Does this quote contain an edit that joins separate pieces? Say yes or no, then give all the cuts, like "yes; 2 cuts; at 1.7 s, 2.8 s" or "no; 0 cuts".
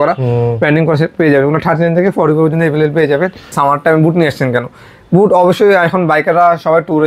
yes; 1 cut; at 3.5 s